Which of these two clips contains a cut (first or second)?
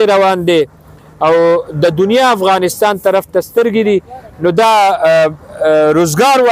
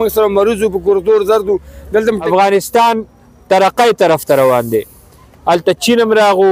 second